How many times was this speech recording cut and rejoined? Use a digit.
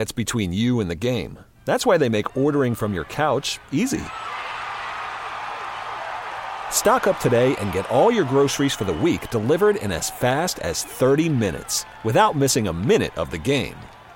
0